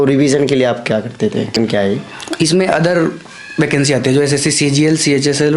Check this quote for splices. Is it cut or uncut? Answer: cut